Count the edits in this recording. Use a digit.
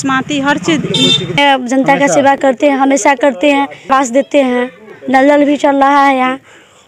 2